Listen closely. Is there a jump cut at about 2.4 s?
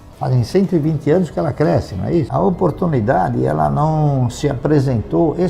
yes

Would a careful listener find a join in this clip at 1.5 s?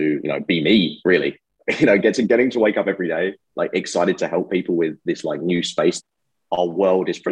no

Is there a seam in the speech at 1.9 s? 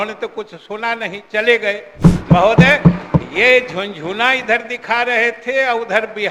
yes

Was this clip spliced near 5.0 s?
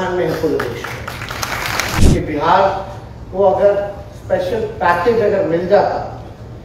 no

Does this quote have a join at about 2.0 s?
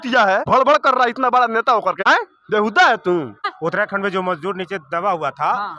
yes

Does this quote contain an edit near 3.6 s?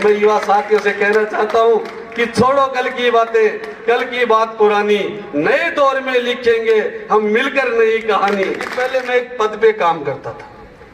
no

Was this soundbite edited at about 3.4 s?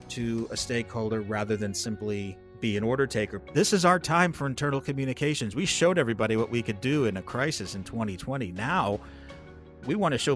yes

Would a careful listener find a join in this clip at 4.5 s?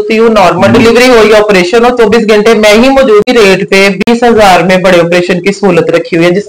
no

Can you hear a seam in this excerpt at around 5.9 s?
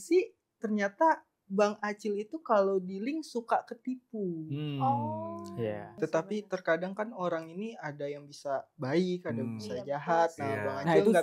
yes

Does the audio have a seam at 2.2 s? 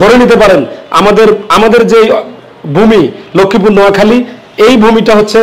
no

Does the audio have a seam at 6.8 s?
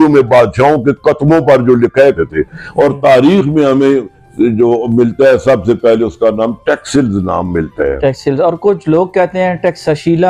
no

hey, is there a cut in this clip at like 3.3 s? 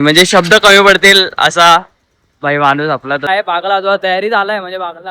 yes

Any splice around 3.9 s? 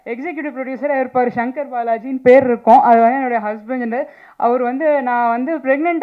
no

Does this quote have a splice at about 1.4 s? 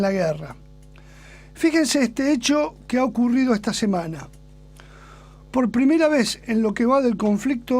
yes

